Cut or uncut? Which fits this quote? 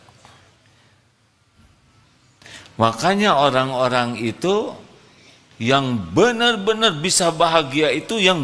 uncut